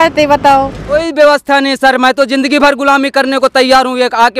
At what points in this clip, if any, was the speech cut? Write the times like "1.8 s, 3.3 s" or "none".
0.9 s